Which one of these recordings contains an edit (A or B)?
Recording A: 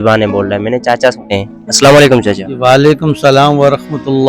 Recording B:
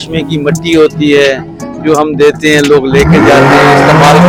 A